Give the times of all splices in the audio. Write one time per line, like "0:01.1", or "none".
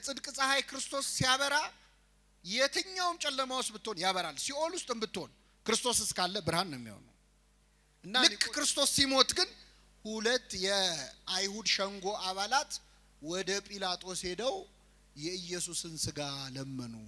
0:08.2

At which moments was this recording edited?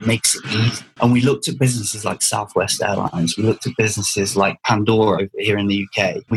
0:05.2

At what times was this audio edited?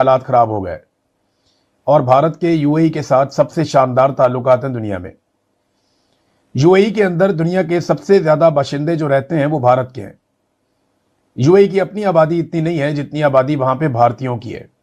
none

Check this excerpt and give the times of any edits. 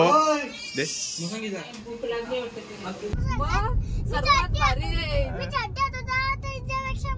0:03.1

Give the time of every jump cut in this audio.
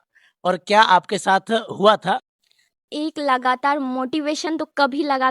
0:02.8

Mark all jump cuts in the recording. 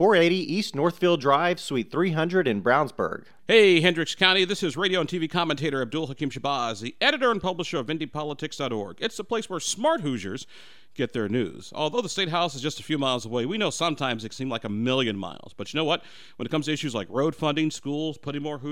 0:03.3

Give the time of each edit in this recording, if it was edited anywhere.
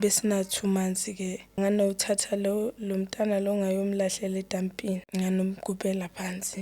0:01.6
0:05.0

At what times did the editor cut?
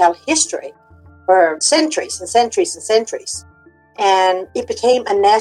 0:01.6
0:04.5

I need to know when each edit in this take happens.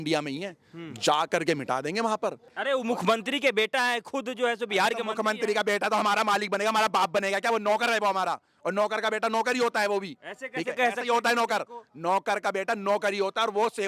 0:02.5

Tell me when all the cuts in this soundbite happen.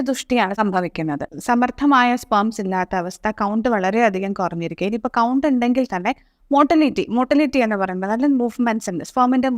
0:01.3

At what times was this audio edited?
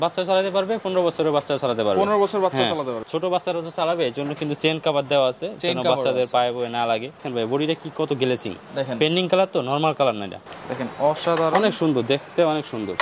0:03.0
0:07.2
0:10.4

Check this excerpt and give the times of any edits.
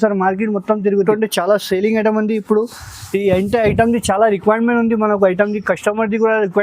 0:01.0

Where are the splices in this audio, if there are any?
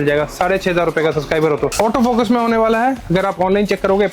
0:01.7

